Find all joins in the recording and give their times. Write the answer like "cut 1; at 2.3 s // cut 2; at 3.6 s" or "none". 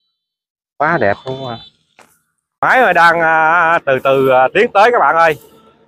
cut 1; at 2.5 s